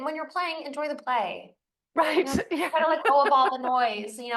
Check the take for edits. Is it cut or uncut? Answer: uncut